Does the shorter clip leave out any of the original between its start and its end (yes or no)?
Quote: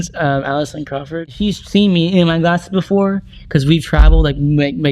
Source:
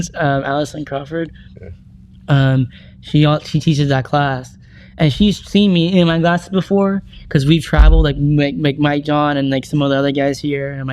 yes